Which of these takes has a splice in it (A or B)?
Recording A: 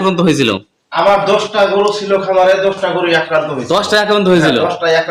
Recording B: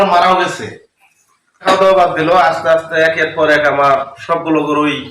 B